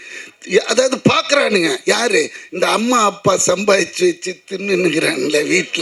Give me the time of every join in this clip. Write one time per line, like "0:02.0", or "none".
none